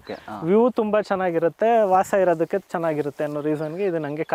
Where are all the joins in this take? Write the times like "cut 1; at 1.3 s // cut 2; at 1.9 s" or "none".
none